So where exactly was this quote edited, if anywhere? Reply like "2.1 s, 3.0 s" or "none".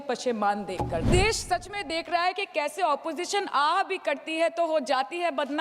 1.0 s